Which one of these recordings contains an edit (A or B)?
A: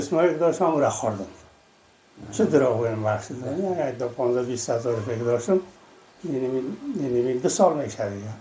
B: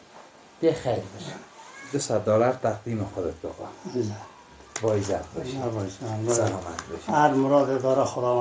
B